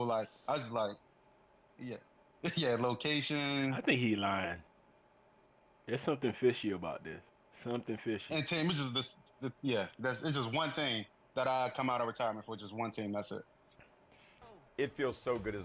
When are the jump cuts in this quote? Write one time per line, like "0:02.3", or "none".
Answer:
0:14.4